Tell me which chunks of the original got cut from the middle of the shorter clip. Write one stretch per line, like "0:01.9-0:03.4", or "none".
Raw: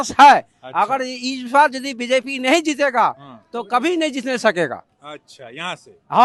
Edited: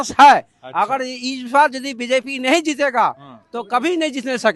none

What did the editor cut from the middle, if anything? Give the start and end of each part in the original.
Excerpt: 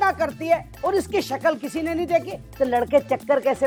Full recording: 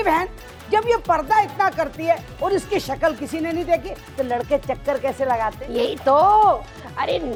none

